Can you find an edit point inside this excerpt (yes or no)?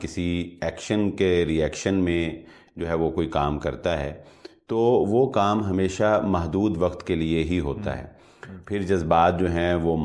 no